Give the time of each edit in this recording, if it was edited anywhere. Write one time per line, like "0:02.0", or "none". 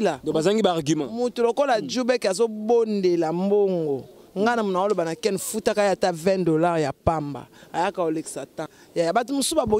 0:08.7